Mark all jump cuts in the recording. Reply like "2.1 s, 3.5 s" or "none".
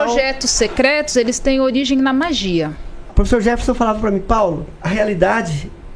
3.1 s, 4.7 s